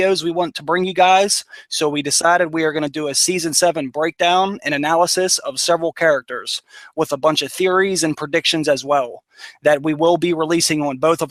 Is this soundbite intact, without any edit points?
yes; 0 cuts

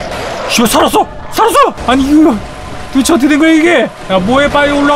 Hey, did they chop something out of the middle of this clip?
yes; 2 cuts; at 1.8 s, 4.0 s

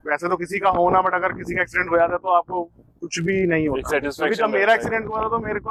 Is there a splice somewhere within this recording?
no; 0 cuts

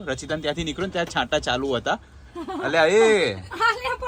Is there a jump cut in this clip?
no; 0 cuts

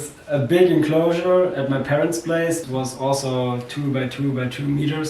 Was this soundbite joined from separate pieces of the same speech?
yes; 1 cut; at 2.6 s

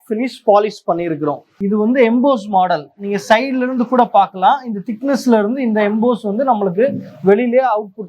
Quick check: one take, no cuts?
no; 1 cut; at 1.6 s

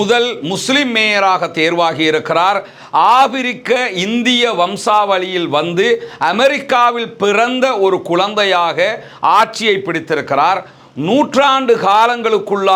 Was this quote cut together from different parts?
no; 0 cuts

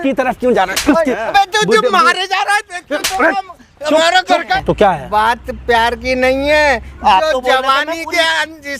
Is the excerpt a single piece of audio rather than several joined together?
no; 1 cut; at 4.6 s

